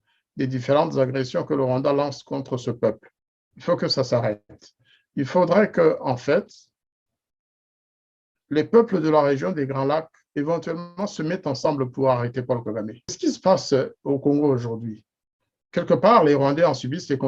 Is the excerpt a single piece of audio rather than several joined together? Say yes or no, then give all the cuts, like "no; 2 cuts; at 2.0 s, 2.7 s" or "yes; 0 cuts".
no; 1 cut; at 13.2 s